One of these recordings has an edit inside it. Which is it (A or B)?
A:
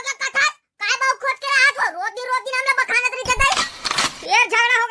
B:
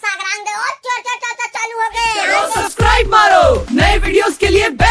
B